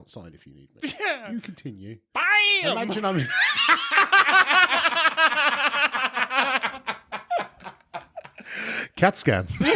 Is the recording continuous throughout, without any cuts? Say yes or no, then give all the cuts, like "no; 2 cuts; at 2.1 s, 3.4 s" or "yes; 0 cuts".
yes; 0 cuts